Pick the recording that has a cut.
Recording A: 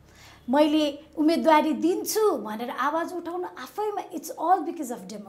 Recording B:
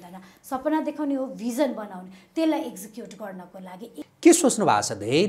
B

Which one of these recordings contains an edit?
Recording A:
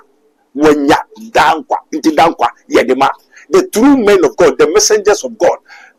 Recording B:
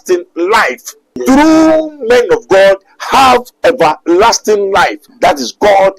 B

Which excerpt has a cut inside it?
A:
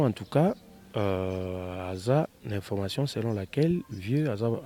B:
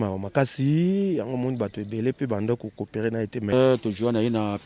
B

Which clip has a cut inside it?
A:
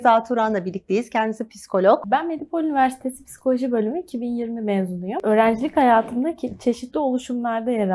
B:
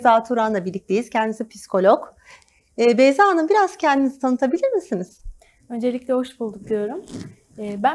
A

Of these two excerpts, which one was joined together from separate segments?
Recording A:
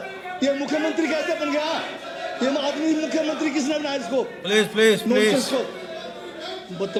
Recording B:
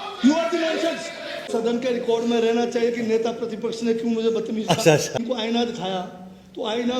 B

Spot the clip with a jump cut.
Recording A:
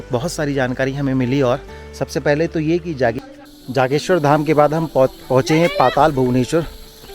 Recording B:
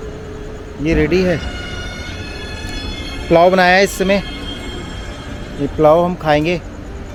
A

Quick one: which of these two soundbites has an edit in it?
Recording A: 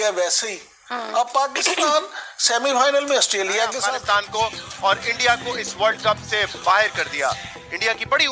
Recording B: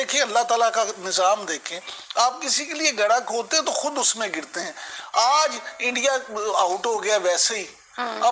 A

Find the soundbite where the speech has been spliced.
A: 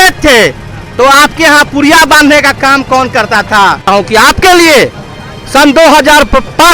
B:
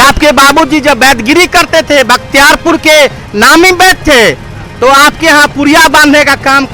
A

